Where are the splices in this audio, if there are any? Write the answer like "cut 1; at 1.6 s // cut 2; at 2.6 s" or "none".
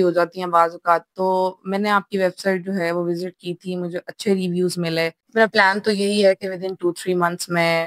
cut 1; at 5.2 s